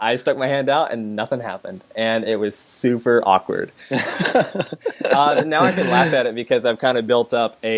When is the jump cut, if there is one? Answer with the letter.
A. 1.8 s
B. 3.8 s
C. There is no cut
C